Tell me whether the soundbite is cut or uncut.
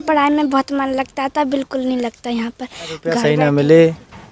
cut